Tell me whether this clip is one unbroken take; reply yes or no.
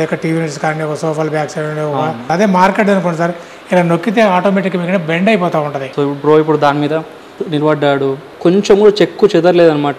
no